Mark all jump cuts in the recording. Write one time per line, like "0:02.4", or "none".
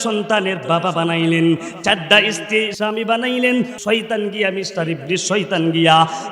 0:02.7
0:03.8